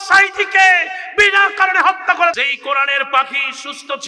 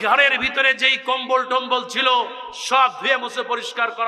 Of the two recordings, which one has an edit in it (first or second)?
first